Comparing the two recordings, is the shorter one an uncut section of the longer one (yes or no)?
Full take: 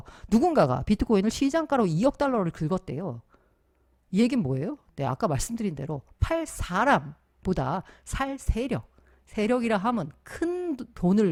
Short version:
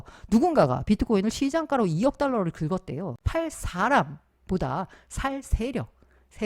no